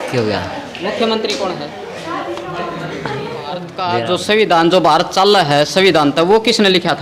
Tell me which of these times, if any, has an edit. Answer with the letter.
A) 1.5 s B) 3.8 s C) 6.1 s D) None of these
B